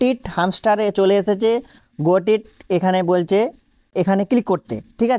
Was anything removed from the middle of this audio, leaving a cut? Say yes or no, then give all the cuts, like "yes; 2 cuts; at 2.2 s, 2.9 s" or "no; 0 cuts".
yes; 1 cut; at 3.9 s